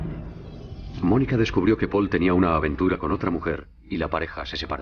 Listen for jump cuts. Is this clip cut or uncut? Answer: uncut